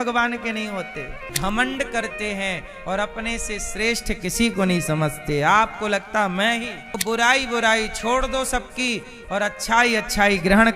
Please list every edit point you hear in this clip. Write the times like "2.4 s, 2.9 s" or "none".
1.2 s, 7.0 s